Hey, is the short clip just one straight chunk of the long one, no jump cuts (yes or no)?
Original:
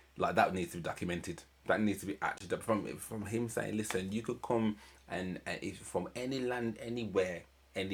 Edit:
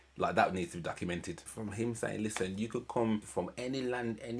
no